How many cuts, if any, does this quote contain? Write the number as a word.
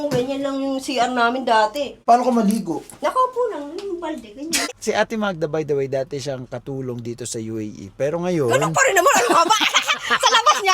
two